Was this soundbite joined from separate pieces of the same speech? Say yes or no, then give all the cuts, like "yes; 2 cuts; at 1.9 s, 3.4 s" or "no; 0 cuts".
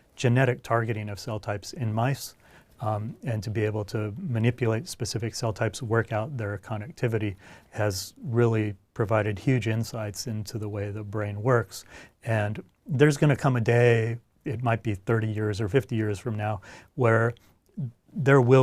no; 0 cuts